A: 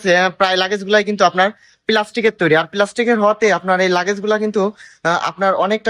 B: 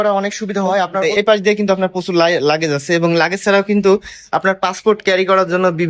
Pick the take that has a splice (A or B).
B